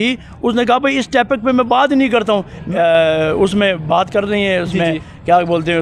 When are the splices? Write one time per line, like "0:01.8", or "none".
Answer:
0:02.7

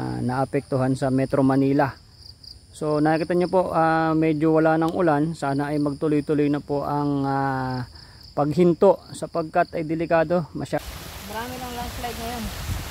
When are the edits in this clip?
0:10.8

